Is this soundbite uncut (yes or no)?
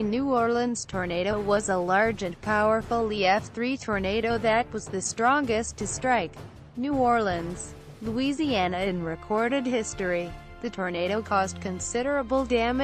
yes